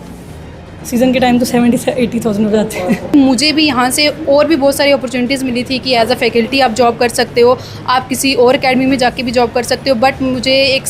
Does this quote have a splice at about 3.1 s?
yes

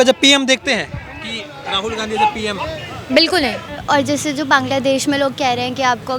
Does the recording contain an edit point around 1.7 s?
no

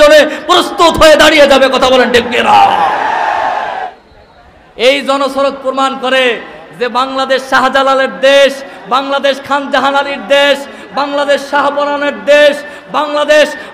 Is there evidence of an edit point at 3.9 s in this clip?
yes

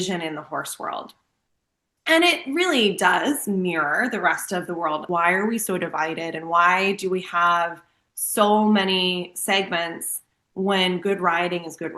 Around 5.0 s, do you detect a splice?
yes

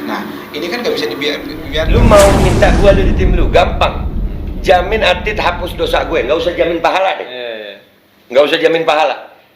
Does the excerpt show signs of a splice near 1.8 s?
yes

